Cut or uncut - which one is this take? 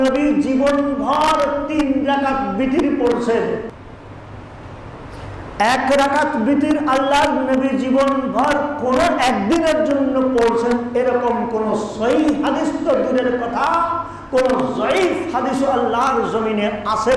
uncut